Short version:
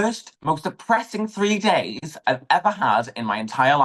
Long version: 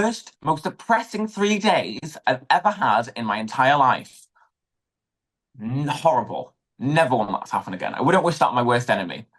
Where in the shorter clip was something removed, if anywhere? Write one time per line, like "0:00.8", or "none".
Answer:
none